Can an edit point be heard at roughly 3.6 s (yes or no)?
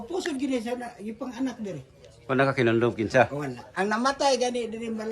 yes